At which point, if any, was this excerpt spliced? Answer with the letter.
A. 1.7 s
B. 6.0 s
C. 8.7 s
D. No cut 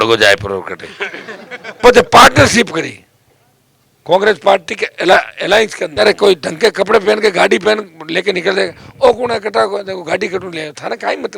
B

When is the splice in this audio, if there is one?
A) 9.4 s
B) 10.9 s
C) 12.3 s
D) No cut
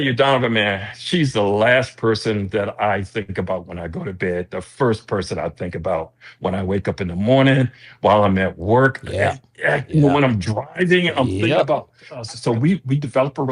C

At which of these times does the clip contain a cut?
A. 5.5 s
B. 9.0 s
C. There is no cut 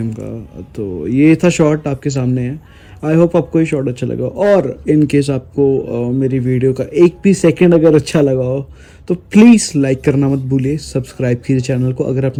C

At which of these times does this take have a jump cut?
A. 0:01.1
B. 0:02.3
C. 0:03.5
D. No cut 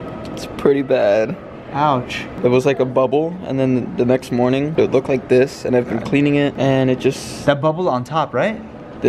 B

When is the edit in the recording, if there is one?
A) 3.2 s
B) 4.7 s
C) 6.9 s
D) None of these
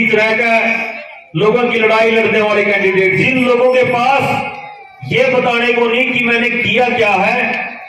A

